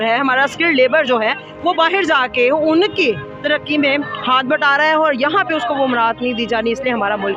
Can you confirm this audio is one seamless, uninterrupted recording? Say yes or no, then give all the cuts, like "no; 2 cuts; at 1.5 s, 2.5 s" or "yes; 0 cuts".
yes; 0 cuts